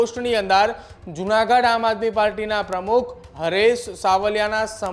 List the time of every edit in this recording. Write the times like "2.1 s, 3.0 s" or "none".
none